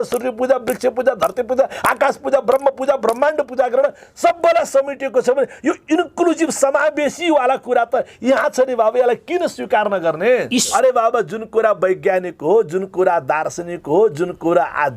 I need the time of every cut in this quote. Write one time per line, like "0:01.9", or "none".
0:10.7